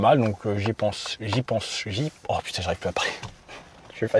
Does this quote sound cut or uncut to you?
uncut